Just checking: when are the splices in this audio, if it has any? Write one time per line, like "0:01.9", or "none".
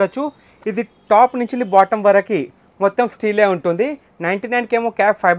none